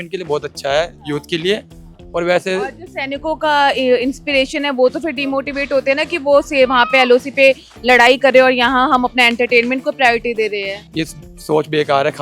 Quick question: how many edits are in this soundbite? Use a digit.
1